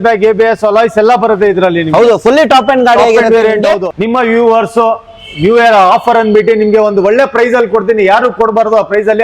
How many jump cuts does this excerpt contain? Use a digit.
1